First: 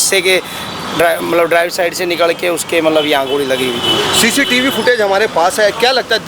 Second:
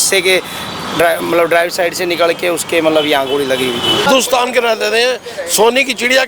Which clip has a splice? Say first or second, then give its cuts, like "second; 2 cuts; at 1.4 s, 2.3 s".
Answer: second; 1 cut; at 4.1 s